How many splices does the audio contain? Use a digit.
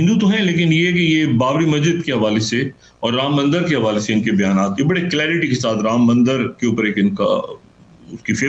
0